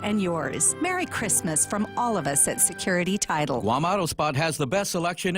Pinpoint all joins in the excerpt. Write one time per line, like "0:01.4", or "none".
0:03.6

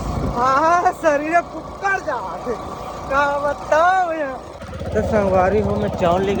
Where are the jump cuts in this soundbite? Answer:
none

